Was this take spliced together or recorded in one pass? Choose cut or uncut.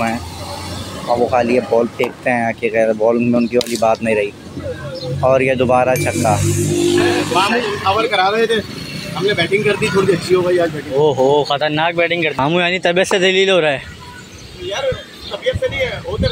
cut